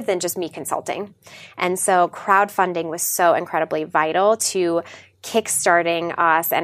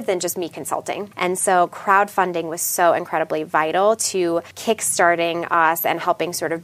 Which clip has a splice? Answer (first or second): second